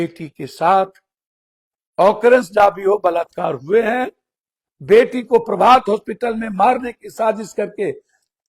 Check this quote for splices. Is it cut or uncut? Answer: uncut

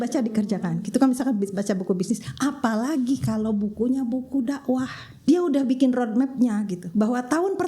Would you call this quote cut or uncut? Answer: cut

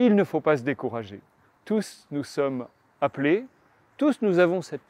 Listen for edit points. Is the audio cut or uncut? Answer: uncut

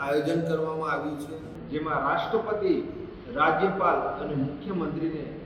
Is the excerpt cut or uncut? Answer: cut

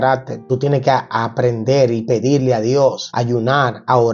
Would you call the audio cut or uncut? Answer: uncut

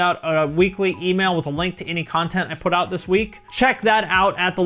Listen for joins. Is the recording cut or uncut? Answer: cut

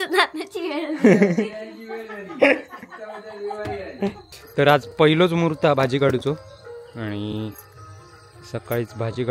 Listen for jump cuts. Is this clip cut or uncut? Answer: cut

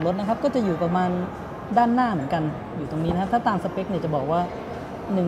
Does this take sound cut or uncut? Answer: uncut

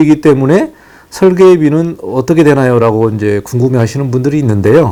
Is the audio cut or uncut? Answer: uncut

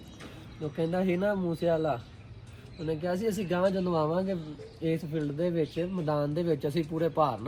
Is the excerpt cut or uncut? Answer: uncut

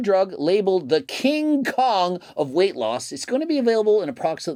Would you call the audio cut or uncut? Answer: uncut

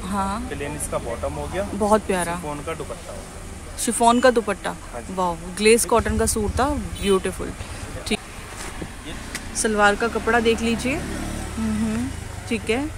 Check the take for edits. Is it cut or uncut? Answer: uncut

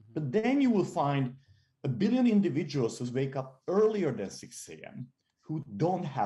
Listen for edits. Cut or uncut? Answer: uncut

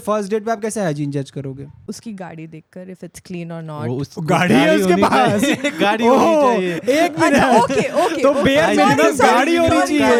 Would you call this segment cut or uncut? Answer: uncut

